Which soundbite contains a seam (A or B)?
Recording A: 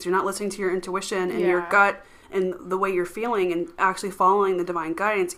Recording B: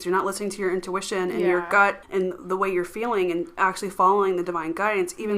B